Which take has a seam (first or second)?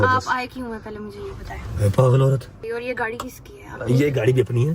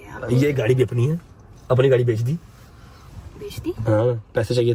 first